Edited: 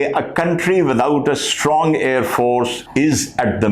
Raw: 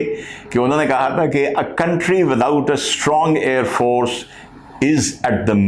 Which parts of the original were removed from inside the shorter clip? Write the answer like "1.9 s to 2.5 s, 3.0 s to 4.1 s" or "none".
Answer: 4.2 s to 4.7 s

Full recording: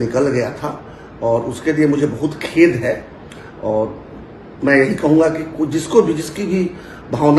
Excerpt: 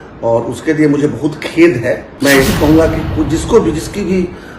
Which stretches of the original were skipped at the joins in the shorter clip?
3.0 s to 4.5 s

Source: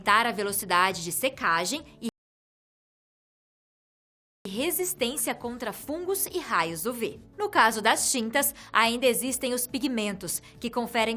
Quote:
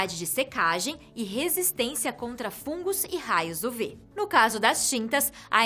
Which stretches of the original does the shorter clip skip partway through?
2.1 s to 4.5 s

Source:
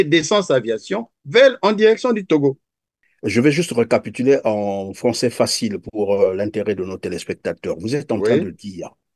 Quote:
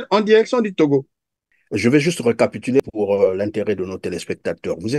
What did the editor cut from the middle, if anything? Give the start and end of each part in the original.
4.3 s to 5.8 s

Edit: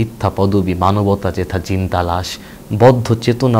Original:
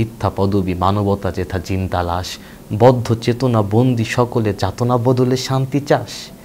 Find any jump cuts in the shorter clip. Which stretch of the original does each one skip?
none

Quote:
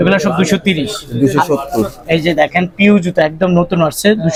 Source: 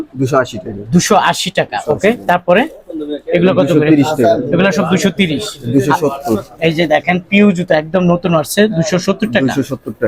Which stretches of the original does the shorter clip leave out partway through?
none

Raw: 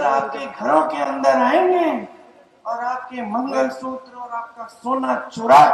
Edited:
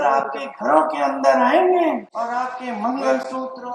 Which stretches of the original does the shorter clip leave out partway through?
2.1 s to 2.6 s

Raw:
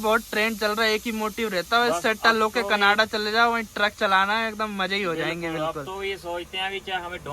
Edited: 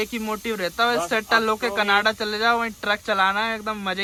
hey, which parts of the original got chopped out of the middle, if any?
none

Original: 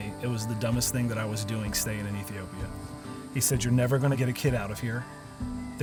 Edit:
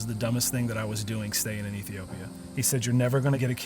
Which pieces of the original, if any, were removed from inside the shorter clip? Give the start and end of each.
2.8 s to 3.2 s

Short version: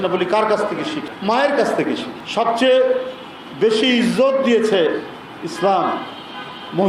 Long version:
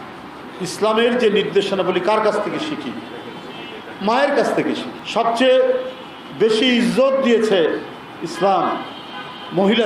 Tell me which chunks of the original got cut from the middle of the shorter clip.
2.8 s to 3.9 s

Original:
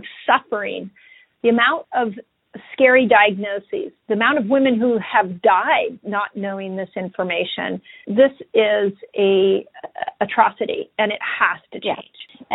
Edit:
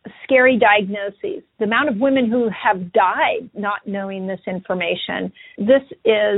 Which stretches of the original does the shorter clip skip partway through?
none

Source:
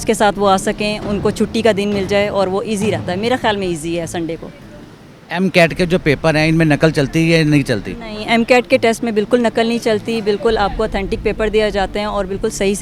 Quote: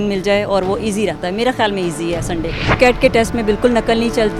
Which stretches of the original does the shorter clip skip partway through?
4.6 s to 8.5 s

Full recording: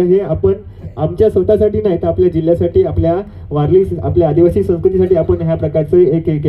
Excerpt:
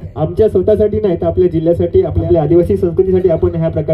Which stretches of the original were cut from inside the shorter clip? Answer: 3.0 s to 4.0 s

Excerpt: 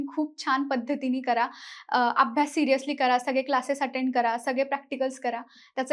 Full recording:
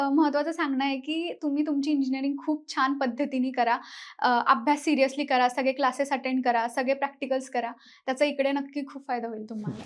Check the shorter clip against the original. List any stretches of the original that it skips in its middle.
none

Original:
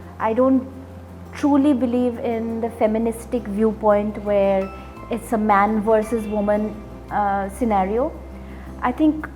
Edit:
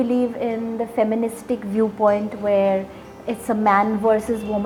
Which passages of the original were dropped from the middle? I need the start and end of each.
none

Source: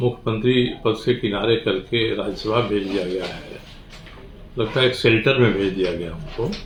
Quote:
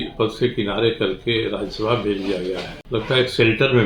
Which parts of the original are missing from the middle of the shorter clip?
3.4 s to 4.4 s

